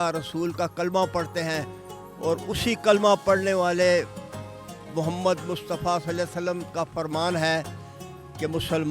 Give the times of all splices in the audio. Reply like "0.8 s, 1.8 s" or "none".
none